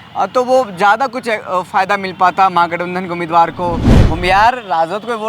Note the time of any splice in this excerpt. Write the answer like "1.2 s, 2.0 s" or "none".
3.9 s